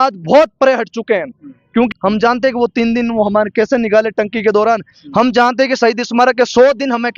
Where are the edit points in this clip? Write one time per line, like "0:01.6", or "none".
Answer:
0:01.9